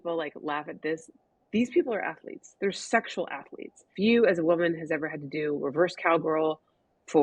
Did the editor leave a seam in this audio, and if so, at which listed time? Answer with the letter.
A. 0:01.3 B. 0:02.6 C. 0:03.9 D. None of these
C